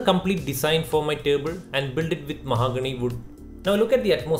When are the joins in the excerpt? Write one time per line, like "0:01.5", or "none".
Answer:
0:03.3